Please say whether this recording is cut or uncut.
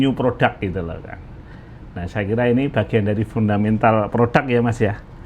uncut